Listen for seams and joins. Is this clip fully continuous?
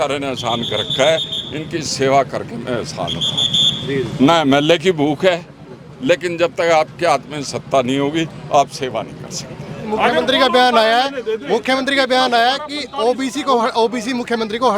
no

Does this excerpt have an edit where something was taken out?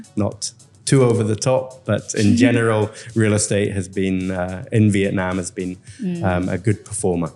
no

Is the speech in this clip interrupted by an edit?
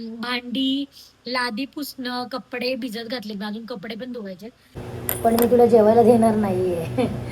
yes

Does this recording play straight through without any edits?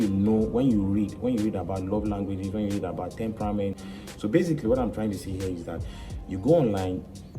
no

